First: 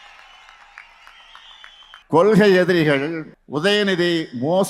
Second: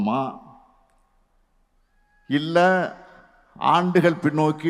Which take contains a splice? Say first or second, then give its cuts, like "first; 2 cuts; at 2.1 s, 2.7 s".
first; 2 cuts; at 2.0 s, 3.3 s